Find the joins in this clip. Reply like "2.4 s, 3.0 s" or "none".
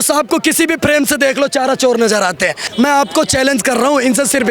2.6 s